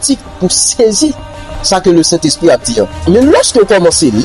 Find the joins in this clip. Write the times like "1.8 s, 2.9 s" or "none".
3.0 s